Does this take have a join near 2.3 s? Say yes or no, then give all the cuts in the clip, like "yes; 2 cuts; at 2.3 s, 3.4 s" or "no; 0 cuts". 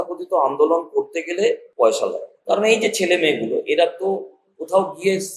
yes; 2 cuts; at 1.7 s, 2.3 s